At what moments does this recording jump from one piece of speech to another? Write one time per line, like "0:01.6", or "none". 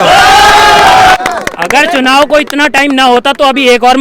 0:01.2